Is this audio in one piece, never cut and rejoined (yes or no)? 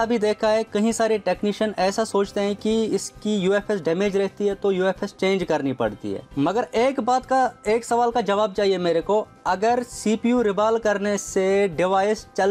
yes